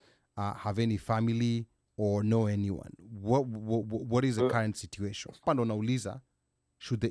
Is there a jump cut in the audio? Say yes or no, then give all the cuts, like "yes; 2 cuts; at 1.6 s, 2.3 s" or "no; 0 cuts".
yes; 1 cut; at 5.4 s